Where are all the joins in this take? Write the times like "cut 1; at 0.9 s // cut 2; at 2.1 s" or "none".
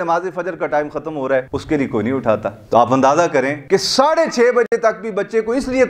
cut 1; at 1.5 s // cut 2; at 3.6 s